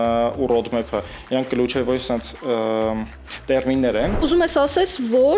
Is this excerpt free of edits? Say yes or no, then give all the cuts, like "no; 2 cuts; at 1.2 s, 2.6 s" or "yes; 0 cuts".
no; 1 cut; at 4.2 s